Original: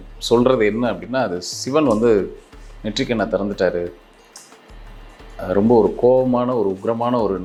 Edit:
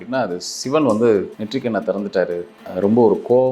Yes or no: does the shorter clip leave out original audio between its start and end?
yes